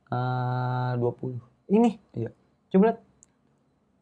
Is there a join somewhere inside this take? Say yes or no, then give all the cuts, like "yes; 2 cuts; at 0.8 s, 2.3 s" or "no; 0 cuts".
no; 0 cuts